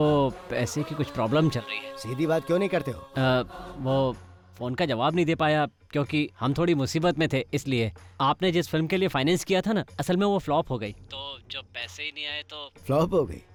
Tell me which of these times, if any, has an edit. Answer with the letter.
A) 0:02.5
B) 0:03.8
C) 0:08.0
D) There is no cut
D